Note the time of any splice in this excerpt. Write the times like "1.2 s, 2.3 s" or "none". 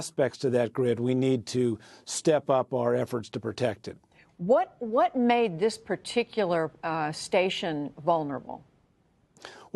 none